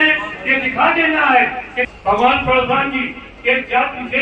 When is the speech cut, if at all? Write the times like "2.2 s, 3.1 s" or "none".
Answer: 1.8 s